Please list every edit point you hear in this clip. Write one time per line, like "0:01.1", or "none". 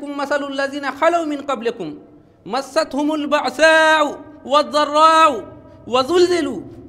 none